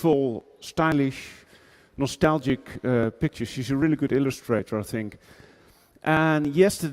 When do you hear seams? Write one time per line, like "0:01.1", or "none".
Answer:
0:04.8